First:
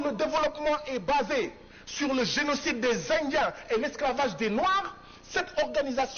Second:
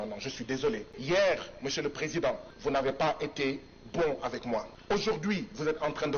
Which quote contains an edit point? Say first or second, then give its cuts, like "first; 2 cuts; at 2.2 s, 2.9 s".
second; 3 cuts; at 0.9 s, 2.5 s, 4.7 s